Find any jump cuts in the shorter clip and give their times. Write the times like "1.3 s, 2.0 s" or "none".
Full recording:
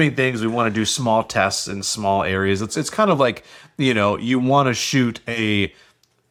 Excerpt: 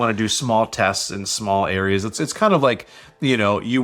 none